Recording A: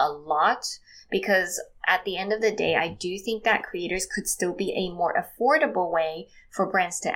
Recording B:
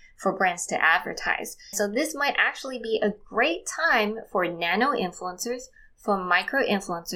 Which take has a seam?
B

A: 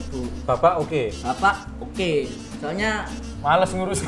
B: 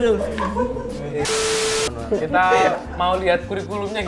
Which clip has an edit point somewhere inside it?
B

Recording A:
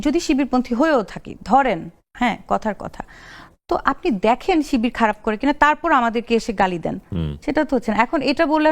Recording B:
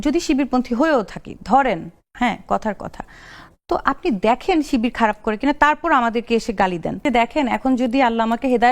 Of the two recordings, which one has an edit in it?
B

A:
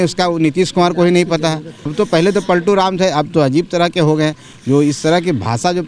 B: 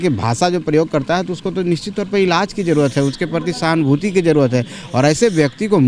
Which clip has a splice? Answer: A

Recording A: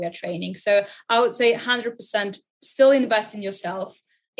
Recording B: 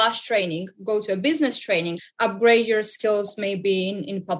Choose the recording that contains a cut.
B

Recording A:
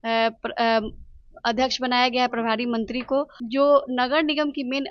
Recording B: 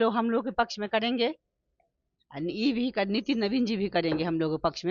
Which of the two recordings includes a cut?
A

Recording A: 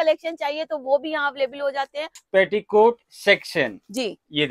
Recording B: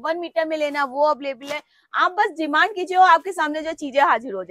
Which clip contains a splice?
A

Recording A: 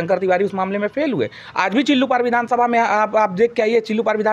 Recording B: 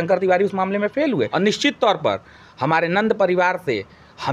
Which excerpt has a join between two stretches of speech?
B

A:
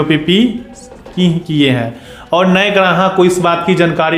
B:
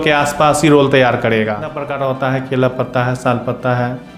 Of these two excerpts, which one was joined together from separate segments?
B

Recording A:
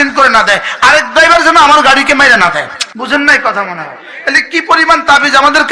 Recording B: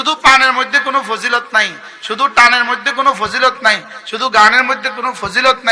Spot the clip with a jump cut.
A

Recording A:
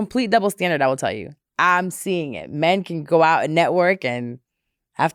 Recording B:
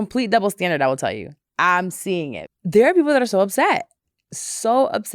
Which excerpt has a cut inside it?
B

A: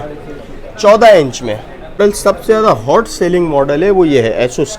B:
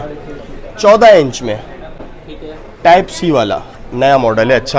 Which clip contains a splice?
A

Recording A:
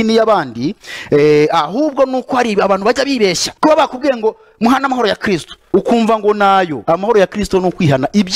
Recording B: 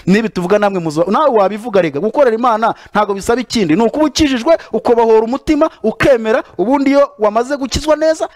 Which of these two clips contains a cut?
A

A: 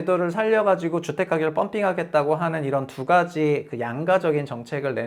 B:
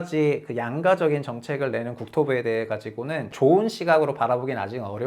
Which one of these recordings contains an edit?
B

